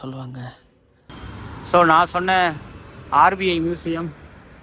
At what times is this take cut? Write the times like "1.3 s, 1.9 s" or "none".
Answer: 1.1 s